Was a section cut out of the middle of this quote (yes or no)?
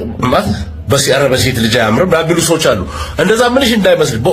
no